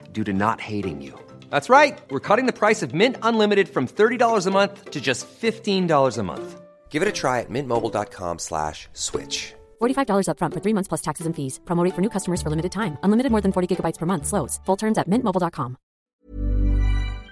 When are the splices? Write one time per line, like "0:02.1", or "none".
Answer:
0:16.1